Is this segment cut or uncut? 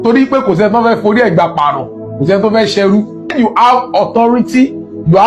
cut